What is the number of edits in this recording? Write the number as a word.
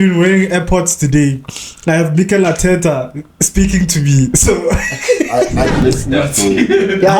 one